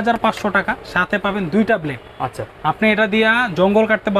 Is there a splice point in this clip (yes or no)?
no